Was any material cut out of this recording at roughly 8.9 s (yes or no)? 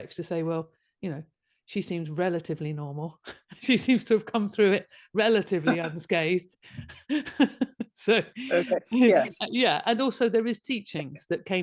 no